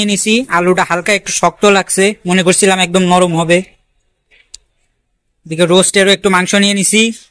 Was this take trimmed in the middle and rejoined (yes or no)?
no